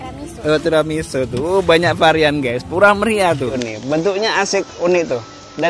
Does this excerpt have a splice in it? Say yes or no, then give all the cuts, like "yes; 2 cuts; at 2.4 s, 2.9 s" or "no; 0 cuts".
yes; 1 cut; at 3.6 s